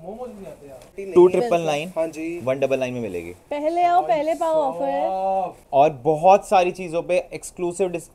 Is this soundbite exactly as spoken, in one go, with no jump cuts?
no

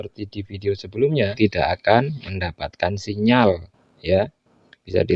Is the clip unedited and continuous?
no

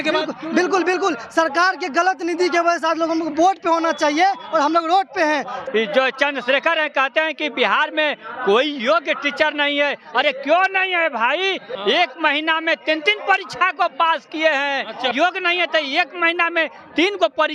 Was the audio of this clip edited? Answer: yes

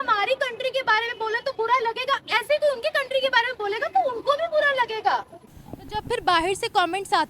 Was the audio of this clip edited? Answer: yes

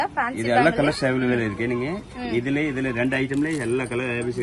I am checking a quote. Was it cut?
no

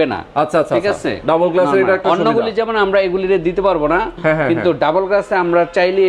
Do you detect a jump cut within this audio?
no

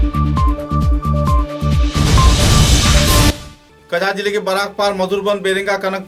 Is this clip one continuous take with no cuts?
yes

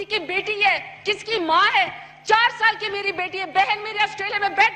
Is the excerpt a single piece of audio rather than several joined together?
yes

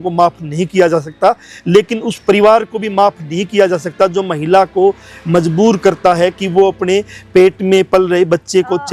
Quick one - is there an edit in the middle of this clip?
no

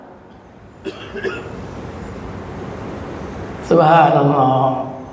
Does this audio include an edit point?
no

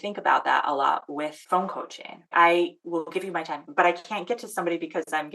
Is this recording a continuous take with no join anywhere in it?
no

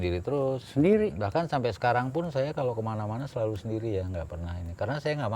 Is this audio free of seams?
yes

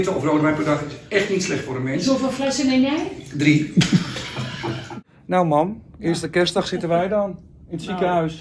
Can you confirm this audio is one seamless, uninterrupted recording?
no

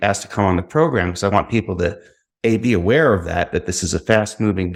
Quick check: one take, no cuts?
yes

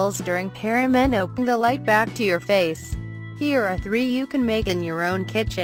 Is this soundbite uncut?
yes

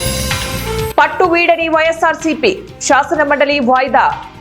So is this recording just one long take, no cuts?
no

